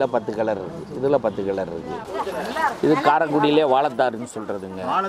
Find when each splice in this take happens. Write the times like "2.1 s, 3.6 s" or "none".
2.0 s